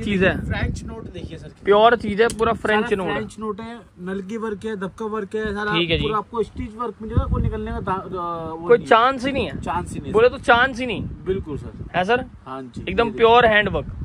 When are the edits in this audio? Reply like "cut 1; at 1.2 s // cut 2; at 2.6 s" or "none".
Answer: none